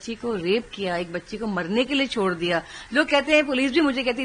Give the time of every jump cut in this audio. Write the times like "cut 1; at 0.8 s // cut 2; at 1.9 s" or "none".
none